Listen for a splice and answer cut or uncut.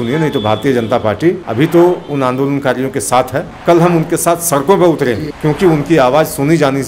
cut